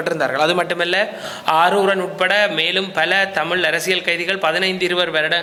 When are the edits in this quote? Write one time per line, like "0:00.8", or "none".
none